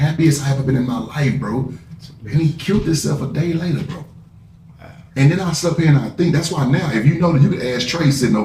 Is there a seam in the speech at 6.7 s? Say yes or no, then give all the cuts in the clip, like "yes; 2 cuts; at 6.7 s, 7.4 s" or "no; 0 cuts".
no; 0 cuts